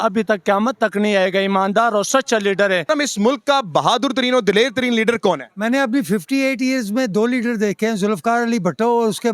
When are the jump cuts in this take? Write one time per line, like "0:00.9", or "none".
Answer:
0:02.8

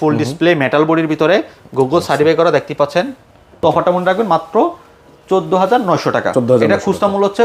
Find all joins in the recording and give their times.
0:03.4

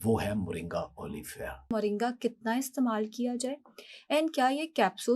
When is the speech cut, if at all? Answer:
0:01.7

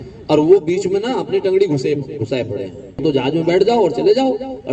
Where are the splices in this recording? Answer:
0:03.0

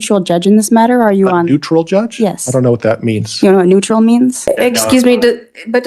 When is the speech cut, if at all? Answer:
0:04.5

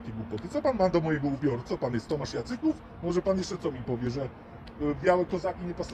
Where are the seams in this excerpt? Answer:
none

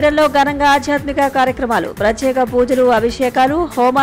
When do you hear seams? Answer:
none

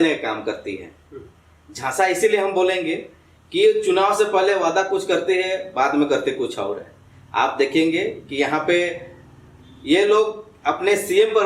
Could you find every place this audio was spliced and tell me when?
none

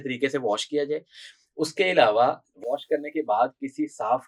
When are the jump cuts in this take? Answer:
none

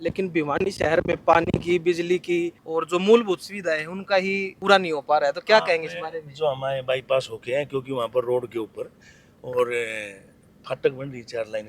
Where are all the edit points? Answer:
0:02.6
0:04.5

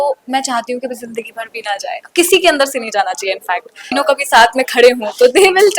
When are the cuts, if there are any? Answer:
0:03.9

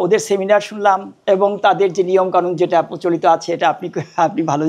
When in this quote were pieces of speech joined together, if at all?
0:01.1

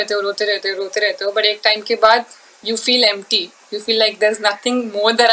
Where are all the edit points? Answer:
none

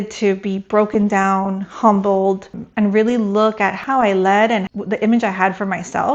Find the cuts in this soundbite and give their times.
0:02.6
0:03.8
0:04.7

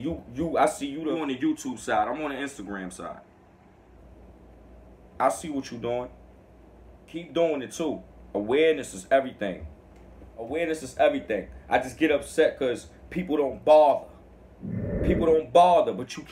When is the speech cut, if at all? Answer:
0:01.0
0:07.3
0:10.5

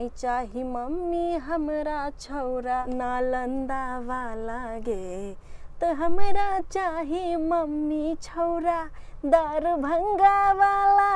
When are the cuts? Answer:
none

